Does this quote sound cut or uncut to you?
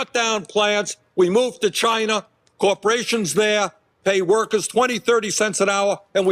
cut